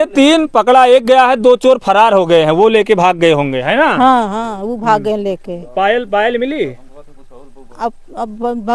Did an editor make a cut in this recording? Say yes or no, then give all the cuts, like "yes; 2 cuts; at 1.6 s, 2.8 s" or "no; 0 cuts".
no; 0 cuts